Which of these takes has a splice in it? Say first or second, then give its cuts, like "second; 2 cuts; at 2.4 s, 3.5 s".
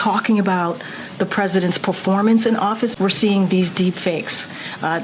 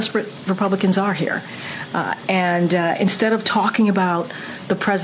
first; 1 cut; at 2.9 s